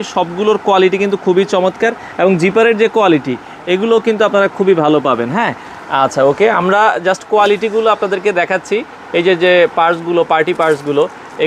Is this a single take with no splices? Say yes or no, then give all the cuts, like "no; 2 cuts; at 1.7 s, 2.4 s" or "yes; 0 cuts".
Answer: yes; 0 cuts